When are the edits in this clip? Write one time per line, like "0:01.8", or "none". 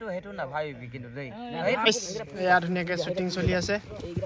0:01.8

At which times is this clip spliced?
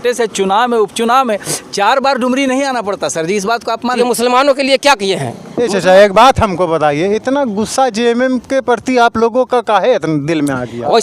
0:03.8

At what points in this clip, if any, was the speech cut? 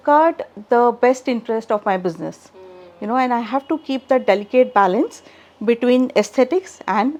none

